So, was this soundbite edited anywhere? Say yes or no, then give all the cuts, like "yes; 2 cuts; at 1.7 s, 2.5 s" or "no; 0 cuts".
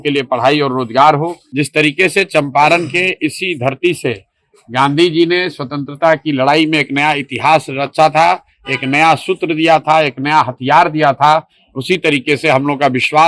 yes; 1 cut; at 1.4 s